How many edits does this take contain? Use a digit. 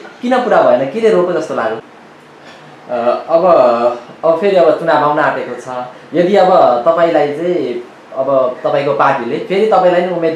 1